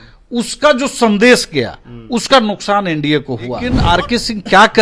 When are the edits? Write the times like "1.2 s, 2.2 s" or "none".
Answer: 3.8 s

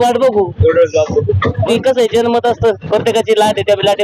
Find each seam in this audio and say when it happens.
1.7 s

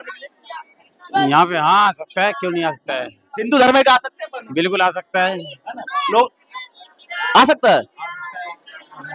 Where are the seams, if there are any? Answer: none

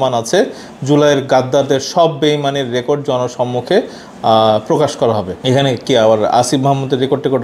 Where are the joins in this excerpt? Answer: none

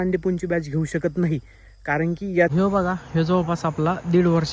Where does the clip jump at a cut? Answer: 2.5 s

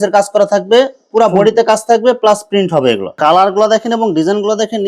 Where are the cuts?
3.1 s

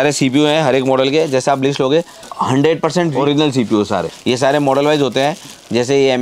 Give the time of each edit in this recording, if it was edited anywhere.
2.2 s, 3.1 s, 4.1 s

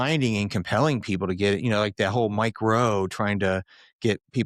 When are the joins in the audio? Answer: none

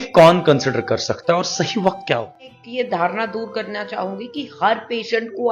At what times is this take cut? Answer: 2.6 s

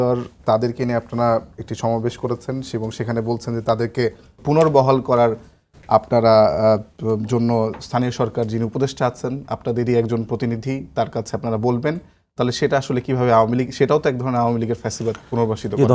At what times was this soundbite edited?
none

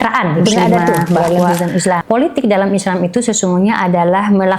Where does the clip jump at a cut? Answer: 2.0 s

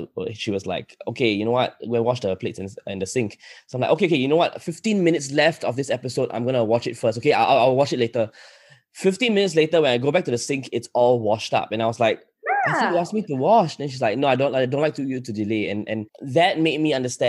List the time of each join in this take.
16.1 s

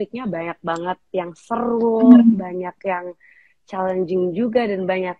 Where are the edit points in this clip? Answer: none

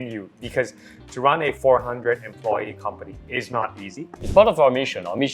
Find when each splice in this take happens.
4.1 s

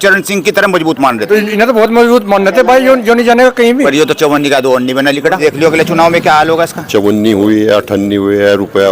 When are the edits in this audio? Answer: 1.2 s, 3.9 s, 5.4 s, 6.8 s

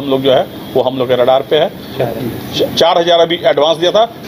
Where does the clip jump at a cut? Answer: 2.0 s

